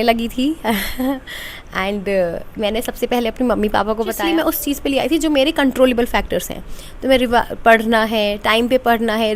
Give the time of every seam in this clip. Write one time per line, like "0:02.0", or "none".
0:04.2